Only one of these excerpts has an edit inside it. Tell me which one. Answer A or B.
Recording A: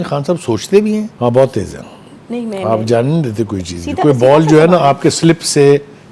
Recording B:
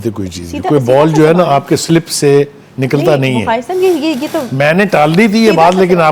A